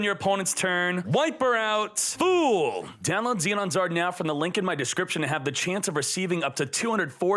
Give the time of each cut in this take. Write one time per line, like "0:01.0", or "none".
0:01.0
0:02.0
0:02.9